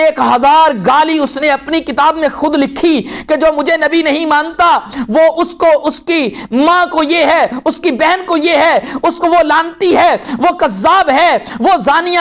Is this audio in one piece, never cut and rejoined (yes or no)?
yes